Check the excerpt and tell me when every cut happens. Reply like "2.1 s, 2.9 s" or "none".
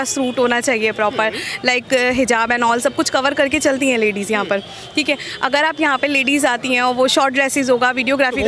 none